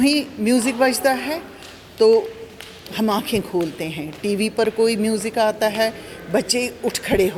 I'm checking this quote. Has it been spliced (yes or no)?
no